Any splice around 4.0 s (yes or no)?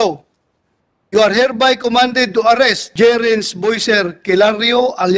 no